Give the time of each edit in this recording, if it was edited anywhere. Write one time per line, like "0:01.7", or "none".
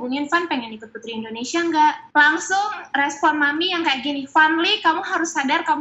0:02.0